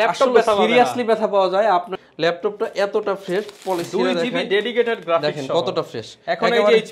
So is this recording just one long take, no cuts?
no; 1 cut; at 1.9 s

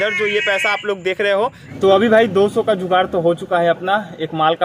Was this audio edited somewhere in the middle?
yes; 1 cut; at 1.6 s

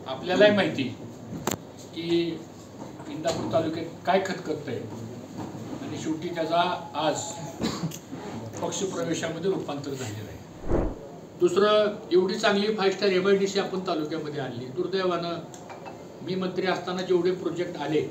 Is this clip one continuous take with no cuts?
no; 1 cut; at 10.8 s

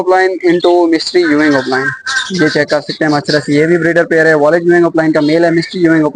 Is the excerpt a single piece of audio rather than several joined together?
yes; 0 cuts

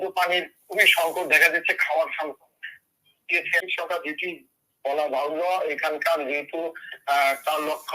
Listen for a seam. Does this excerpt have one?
yes; 1 cut; at 3.6 s

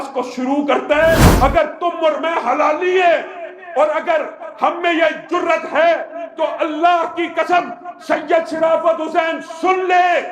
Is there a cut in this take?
yes; 1 cut; at 1.3 s

